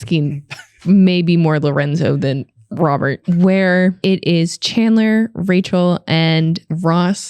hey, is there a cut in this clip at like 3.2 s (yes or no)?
yes